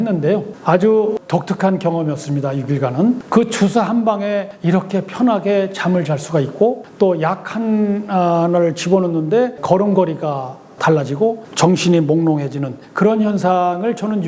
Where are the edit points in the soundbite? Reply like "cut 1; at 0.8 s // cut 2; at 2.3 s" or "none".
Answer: none

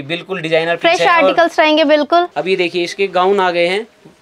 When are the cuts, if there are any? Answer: cut 1; at 2.3 s

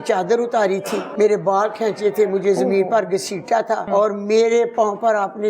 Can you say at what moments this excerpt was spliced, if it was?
cut 1; at 1.1 s // cut 2; at 3.8 s

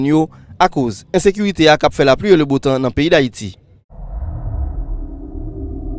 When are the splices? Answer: cut 1; at 4.1 s

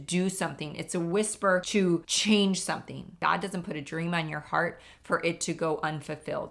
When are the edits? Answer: cut 1; at 1.9 s // cut 2; at 3.1 s

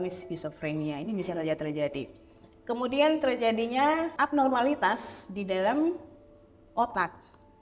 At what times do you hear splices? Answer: cut 1; at 4.1 s

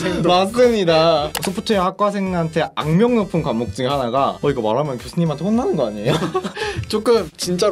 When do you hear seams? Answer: cut 1; at 1.3 s

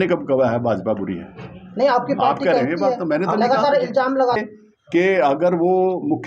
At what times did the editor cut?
cut 1; at 4.4 s

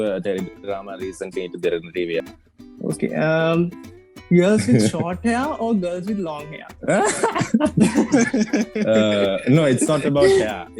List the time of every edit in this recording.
cut 1; at 2.3 s

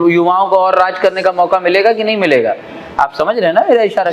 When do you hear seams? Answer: none

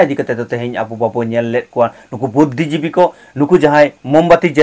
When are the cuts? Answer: none

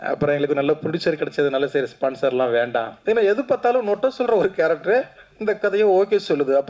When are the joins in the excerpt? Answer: cut 1; at 3.0 s

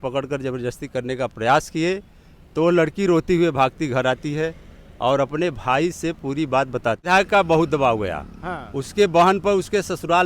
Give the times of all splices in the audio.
cut 1; at 7.1 s

